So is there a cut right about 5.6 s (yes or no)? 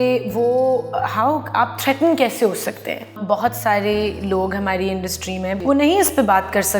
yes